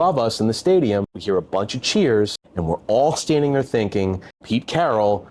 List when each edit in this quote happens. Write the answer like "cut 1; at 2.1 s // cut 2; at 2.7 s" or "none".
cut 1; at 1.2 s // cut 2; at 2.5 s // cut 3; at 4.3 s